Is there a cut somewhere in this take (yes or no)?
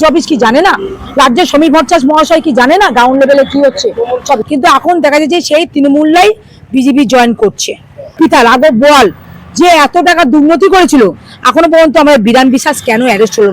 yes